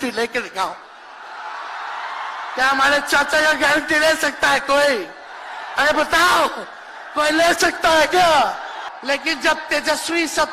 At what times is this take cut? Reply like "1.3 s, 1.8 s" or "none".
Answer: 8.8 s